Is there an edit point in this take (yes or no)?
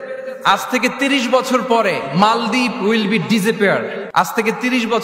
yes